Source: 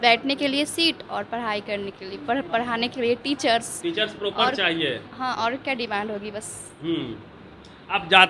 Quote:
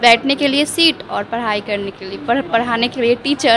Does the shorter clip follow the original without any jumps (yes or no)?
yes